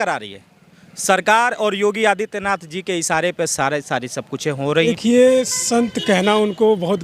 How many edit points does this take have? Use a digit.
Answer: 1